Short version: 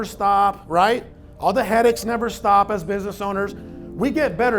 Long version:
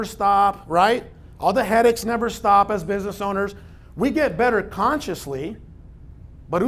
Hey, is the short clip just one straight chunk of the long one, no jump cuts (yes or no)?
yes